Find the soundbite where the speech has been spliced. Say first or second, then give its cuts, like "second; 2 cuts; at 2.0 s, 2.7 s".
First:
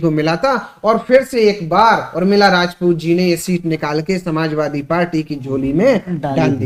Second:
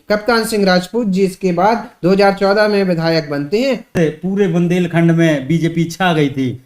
second; 1 cut; at 3.9 s